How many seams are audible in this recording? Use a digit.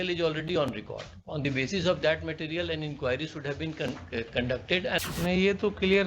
1